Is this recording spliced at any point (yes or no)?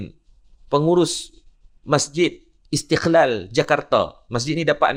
no